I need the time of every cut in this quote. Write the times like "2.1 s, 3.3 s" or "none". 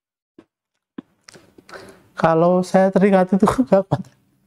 none